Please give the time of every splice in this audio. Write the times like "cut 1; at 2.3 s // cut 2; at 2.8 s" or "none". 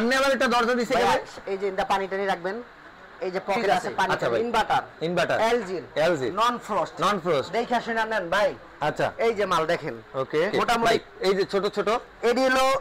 cut 1; at 4.1 s // cut 2; at 10.9 s